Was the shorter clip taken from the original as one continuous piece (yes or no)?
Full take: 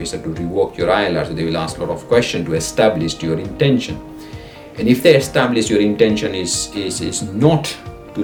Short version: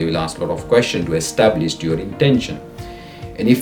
yes